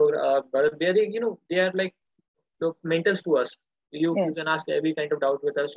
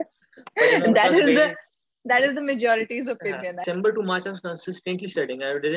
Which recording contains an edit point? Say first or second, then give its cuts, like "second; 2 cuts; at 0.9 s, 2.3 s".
second; 1 cut; at 3.6 s